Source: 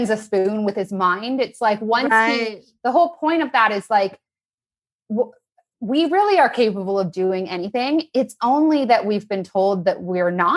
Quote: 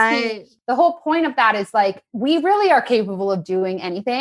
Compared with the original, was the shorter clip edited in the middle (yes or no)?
yes